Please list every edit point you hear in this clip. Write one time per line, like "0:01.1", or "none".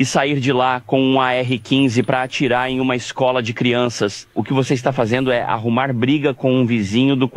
0:04.3